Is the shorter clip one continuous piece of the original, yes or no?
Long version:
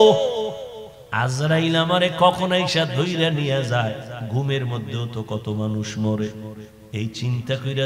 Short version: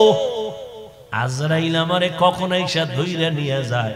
yes